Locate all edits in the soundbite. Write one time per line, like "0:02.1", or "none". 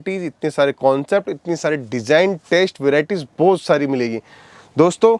none